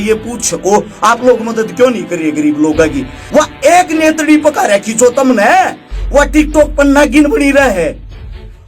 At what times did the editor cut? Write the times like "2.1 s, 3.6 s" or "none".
3.1 s